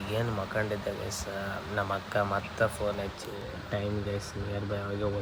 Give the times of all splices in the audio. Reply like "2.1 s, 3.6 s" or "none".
none